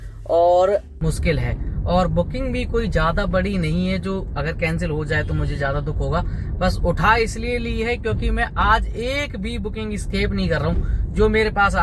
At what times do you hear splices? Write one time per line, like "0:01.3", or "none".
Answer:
0:00.9